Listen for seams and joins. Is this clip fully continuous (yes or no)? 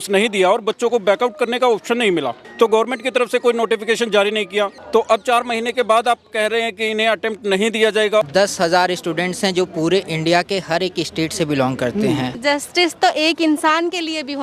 no